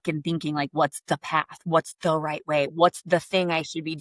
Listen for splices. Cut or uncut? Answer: uncut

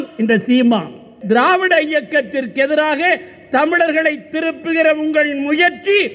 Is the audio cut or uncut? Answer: cut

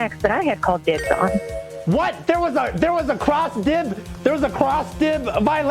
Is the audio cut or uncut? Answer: uncut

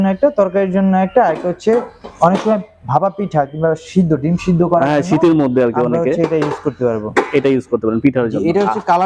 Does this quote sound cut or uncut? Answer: uncut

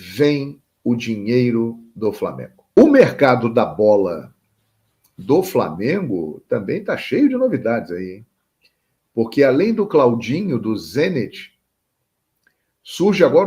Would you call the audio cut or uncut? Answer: cut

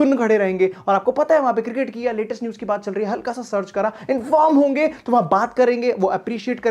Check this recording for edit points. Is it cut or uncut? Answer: uncut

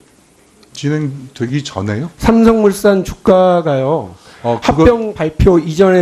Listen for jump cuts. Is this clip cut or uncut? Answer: cut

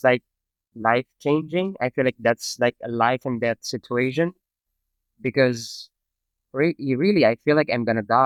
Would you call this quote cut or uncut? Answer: uncut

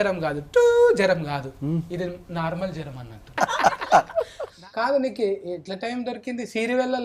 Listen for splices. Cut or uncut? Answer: cut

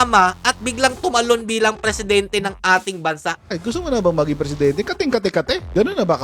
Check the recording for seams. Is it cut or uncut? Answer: cut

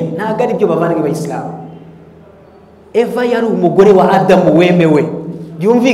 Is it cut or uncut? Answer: uncut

